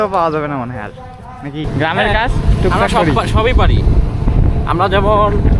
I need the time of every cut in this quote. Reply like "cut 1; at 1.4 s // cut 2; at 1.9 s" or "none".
cut 1; at 1.6 s